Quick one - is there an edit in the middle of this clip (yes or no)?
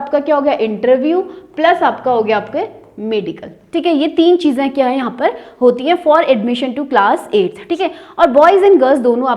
no